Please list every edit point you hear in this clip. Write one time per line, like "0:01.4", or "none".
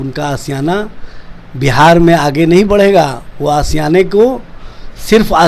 none